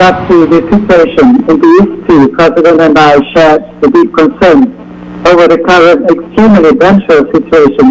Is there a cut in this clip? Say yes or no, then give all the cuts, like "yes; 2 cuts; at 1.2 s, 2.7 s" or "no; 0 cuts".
no; 0 cuts